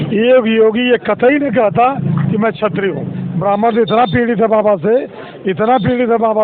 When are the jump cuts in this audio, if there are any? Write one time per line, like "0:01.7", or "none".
0:03.2